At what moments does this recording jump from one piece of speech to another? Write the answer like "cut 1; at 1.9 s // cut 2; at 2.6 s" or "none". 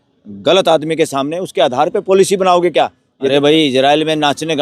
cut 1; at 3.3 s

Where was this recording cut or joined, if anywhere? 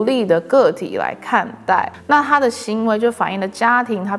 none

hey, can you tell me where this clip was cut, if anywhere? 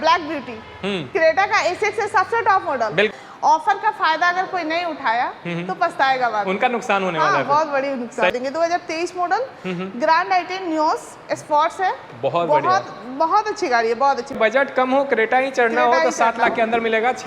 cut 1; at 3.1 s // cut 2; at 8.3 s // cut 3; at 14.4 s

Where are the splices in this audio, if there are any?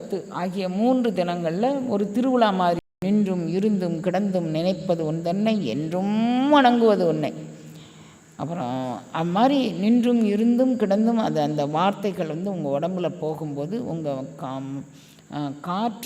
cut 1; at 2.8 s

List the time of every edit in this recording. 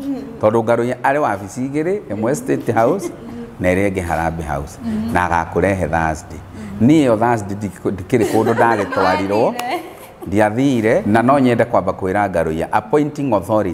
cut 1; at 11.0 s

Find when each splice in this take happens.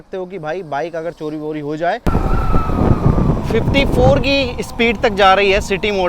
cut 1; at 2.0 s

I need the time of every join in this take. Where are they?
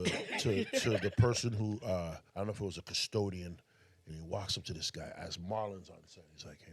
cut 1; at 2.2 s

